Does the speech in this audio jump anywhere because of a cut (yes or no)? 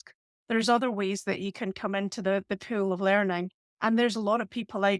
no